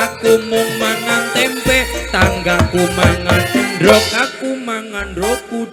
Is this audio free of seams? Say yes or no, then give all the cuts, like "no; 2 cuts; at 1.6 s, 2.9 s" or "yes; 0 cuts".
yes; 0 cuts